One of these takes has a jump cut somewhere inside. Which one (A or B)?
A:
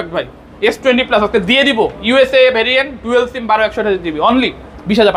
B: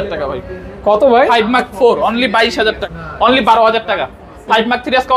B